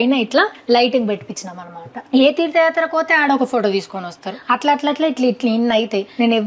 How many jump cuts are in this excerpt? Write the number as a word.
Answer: one